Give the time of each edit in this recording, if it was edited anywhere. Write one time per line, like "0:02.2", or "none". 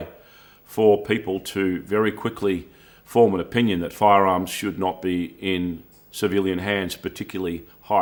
none